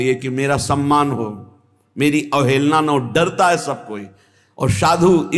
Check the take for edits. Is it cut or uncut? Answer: uncut